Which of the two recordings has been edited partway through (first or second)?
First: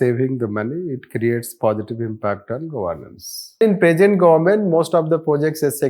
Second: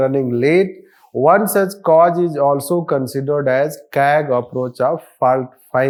first